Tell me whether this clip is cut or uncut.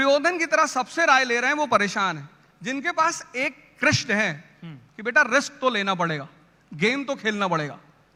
uncut